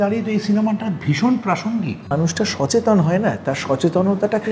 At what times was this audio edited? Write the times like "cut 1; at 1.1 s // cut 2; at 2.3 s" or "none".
cut 1; at 2.1 s